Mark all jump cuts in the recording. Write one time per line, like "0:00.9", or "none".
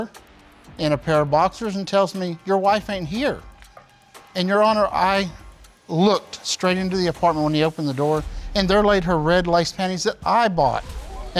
none